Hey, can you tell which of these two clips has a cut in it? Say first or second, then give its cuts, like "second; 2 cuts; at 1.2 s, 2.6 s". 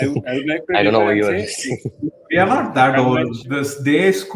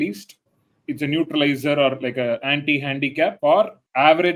first; 1 cut; at 3.4 s